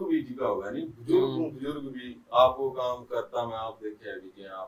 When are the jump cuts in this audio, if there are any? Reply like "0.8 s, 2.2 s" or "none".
none